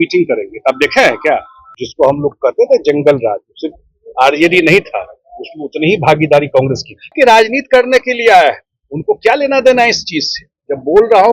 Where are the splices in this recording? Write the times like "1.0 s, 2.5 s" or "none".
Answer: 1.8 s, 7.1 s